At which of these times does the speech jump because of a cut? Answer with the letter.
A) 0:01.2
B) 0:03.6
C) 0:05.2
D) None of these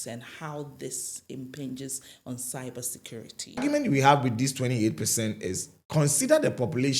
B